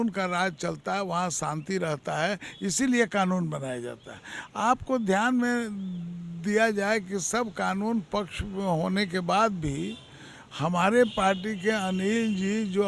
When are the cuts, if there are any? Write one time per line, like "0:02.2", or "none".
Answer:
none